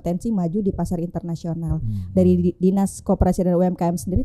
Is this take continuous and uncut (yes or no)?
yes